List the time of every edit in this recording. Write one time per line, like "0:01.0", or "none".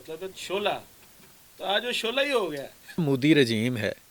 0:03.0